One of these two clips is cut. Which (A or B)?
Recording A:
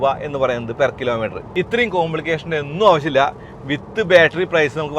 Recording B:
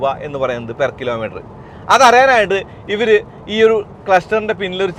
A